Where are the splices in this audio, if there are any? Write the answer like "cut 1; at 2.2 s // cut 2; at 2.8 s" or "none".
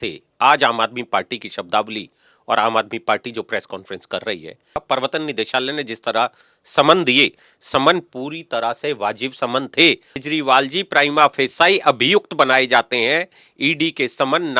cut 1; at 4.7 s // cut 2; at 10.2 s